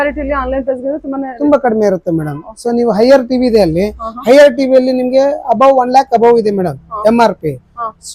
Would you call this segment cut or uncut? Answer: uncut